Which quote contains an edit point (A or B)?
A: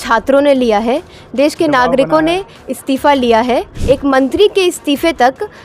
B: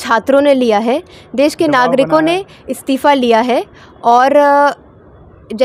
A